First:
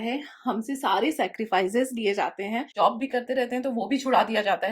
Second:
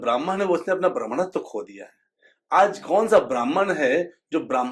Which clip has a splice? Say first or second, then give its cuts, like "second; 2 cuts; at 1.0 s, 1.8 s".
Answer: first; 1 cut; at 2.7 s